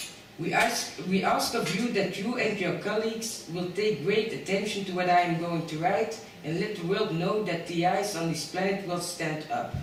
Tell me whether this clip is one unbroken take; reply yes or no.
yes